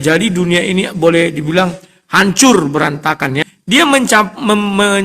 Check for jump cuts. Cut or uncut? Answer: cut